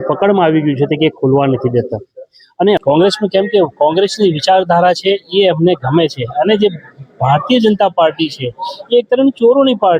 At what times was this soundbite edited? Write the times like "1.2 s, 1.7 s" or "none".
2.8 s